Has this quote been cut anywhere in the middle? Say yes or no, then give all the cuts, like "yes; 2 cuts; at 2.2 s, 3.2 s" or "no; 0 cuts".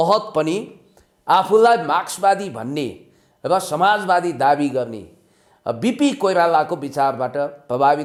no; 0 cuts